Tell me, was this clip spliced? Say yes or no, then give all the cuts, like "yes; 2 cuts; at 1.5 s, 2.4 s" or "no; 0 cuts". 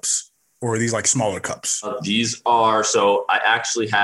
yes; 1 cut; at 1.9 s